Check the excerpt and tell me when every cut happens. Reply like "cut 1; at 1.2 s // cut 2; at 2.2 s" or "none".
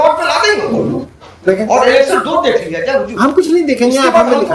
none